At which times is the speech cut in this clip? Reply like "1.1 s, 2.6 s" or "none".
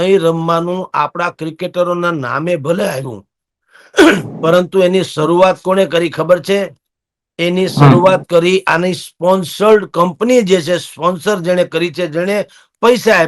none